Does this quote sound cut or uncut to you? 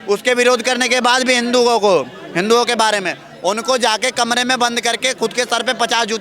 uncut